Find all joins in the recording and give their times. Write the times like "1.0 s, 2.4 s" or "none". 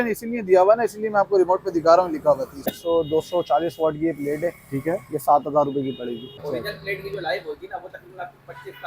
2.7 s, 6.4 s